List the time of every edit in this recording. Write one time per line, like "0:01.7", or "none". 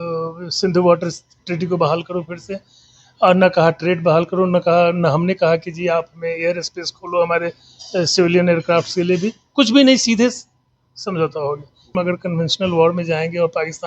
0:11.9

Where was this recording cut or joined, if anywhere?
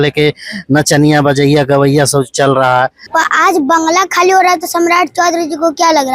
0:03.0

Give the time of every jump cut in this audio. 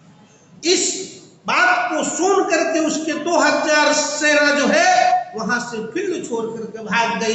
none

